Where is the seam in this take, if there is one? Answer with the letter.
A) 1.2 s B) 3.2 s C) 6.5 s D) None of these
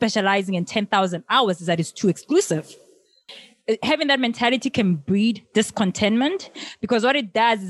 B